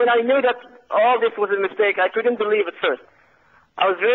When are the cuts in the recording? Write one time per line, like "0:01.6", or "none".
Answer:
none